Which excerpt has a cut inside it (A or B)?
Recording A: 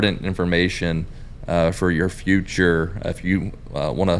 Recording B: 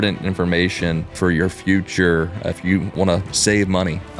B